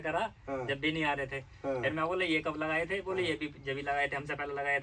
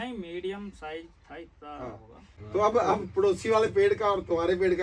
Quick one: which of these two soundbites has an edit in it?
second; 1 cut; at 2.3 s

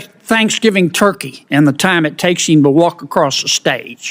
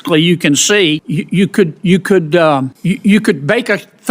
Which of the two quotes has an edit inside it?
second; 2 cuts; at 1.1 s, 2.7 s

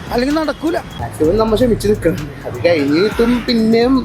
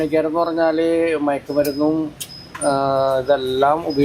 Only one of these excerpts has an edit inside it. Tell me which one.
first; 1 cut; at 1.0 s

